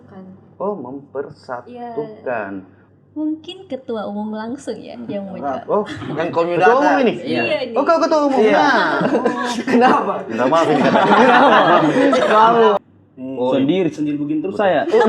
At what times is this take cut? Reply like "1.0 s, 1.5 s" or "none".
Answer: 2.8 s, 12.8 s